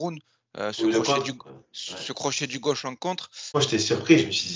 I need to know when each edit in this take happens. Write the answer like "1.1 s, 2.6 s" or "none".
3.6 s